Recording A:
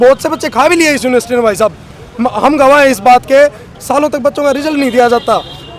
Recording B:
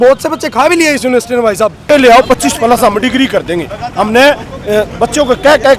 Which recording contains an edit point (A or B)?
B